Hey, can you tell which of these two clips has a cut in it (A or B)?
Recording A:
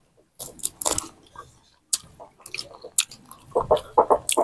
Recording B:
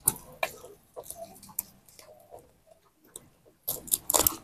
A